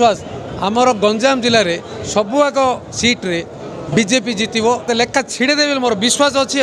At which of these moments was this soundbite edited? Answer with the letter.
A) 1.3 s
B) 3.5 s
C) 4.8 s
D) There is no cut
C